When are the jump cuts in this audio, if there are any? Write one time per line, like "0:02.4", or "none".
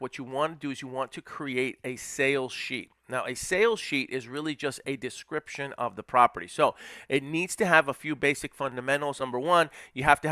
0:09.2